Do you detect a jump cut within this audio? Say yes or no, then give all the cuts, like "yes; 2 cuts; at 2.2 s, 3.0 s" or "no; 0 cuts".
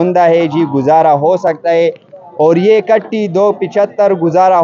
no; 0 cuts